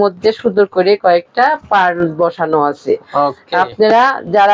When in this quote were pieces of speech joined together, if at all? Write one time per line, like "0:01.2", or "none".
none